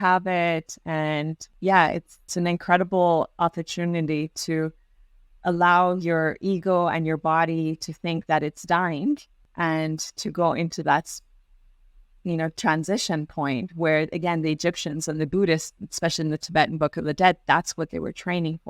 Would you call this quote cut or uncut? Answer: cut